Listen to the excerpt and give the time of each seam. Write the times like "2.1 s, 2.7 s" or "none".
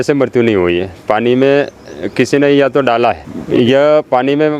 3.3 s